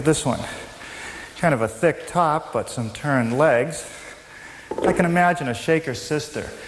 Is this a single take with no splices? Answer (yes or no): yes